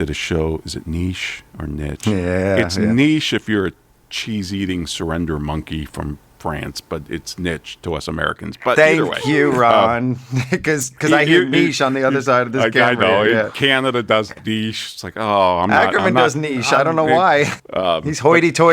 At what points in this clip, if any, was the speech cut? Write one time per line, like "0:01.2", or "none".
0:17.6